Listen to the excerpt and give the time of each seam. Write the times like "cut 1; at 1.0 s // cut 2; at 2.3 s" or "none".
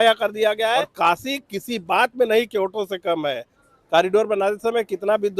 cut 1; at 0.9 s // cut 2; at 3.6 s